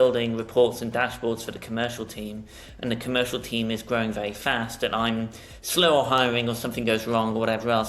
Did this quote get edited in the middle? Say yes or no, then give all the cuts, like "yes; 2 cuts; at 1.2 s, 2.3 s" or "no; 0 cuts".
no; 0 cuts